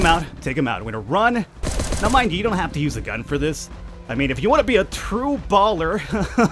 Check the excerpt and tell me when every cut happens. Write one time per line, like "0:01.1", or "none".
0:01.7